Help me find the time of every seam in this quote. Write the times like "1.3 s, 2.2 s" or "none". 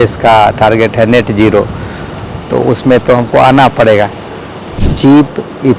4.6 s